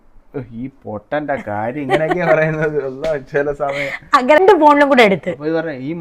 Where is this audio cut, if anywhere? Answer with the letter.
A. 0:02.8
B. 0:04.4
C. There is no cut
B